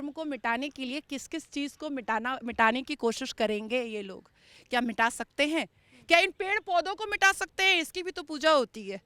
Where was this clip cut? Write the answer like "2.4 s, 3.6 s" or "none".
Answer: none